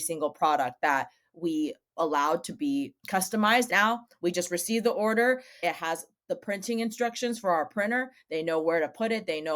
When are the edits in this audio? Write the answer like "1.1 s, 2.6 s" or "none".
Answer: 3.7 s, 5.6 s